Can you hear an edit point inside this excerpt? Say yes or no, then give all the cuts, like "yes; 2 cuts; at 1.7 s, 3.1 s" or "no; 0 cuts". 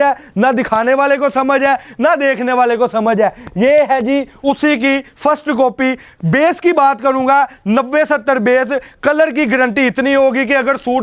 no; 0 cuts